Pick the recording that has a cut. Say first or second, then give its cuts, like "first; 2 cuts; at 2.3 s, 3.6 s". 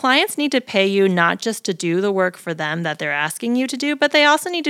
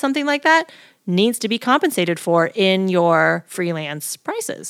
second; 1 cut; at 3.5 s